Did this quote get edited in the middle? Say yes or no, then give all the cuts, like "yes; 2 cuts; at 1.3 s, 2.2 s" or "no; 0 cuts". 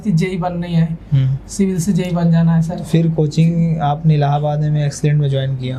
no; 0 cuts